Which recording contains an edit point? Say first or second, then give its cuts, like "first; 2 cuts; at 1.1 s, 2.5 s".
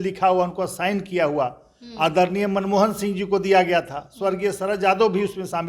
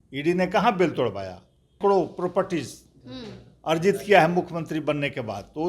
second; 1 cut; at 1.8 s